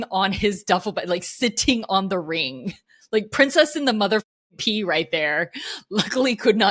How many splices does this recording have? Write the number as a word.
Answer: zero